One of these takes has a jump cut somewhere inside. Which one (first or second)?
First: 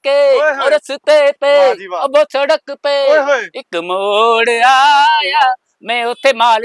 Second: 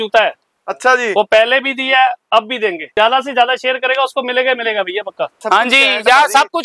second